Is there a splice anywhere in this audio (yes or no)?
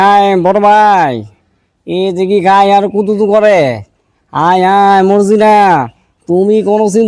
no